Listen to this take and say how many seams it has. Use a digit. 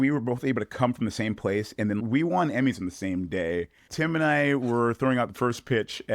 2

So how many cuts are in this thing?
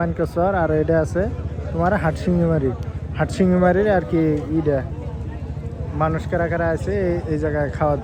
0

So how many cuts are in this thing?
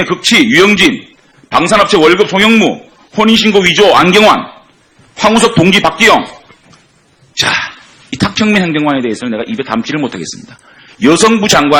1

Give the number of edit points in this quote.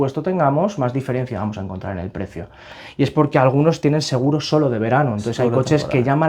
1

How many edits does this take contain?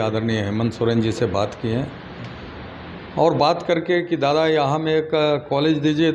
0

